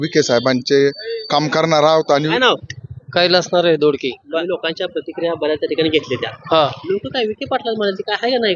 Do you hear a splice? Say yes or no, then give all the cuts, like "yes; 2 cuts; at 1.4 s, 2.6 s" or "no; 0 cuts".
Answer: no; 0 cuts